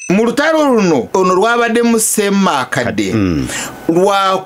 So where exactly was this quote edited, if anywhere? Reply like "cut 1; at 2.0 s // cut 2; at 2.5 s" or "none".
cut 1; at 1.1 s